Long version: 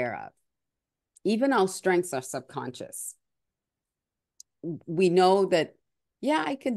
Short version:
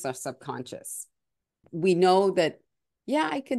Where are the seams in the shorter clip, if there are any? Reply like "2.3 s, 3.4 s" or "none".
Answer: 1.7 s